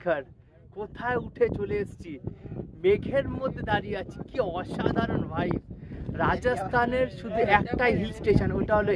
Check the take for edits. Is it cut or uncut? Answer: uncut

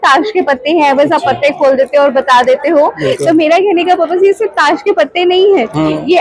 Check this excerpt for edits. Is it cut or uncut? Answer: uncut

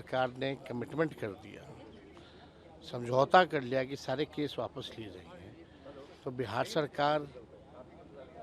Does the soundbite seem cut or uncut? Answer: uncut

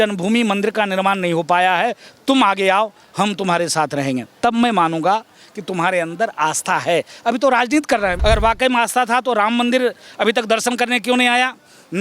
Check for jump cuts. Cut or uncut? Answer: cut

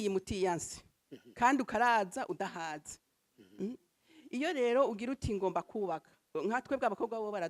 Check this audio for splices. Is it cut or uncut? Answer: uncut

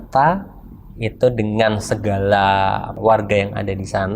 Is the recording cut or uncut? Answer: cut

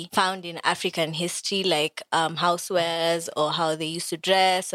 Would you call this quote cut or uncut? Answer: uncut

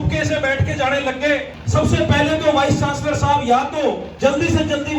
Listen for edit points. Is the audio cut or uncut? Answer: cut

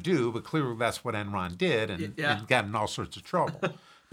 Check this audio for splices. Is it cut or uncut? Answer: uncut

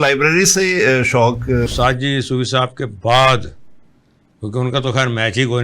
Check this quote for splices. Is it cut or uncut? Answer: cut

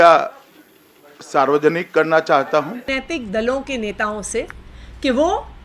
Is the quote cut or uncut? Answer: cut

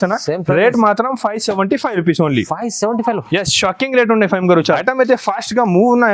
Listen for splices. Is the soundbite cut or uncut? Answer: cut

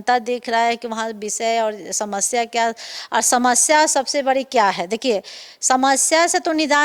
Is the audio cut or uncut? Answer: uncut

